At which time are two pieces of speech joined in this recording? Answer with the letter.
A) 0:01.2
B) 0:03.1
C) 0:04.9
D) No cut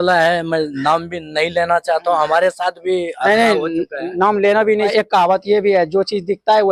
C